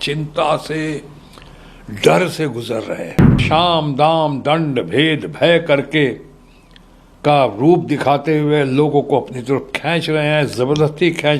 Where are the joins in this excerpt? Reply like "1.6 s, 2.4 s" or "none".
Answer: 3.4 s